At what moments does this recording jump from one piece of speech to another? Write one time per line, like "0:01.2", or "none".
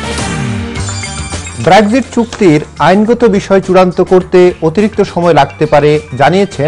0:01.5